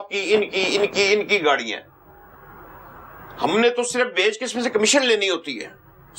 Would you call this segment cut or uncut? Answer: uncut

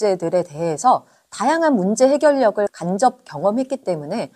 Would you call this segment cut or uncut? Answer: uncut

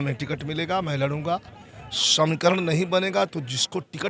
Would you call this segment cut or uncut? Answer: uncut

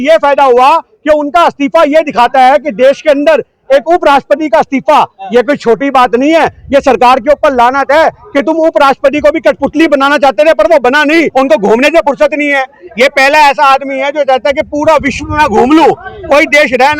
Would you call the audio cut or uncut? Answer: cut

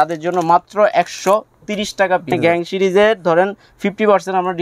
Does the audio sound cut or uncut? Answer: cut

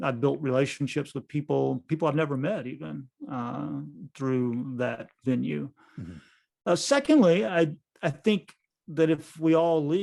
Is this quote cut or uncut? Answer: uncut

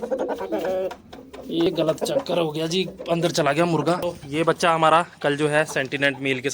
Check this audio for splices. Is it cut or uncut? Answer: cut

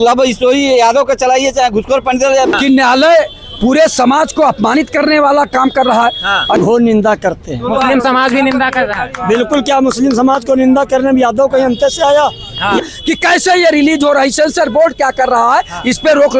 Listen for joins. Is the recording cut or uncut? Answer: cut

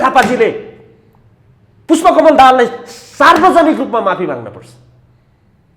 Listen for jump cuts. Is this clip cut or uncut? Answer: uncut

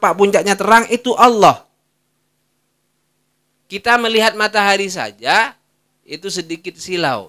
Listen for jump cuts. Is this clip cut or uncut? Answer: uncut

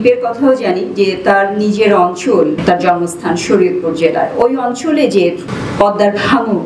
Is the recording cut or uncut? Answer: cut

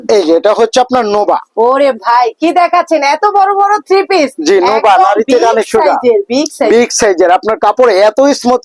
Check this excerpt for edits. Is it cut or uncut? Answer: uncut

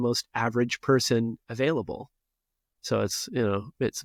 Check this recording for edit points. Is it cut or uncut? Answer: uncut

